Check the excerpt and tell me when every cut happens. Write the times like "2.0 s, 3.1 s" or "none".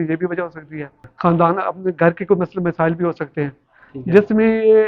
1.0 s